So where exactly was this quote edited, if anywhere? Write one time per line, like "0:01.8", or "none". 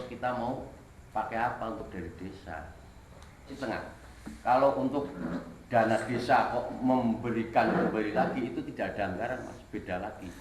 0:03.5